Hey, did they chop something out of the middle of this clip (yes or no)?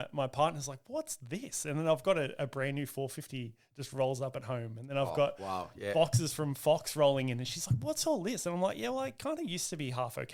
no